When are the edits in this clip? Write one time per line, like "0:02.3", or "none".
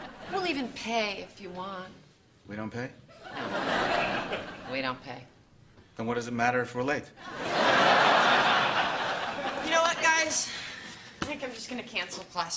none